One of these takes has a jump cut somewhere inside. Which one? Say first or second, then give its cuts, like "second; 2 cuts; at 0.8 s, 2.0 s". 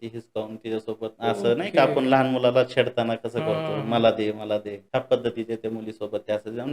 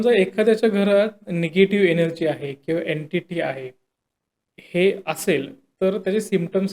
first; 2 cuts; at 1.1 s, 4.8 s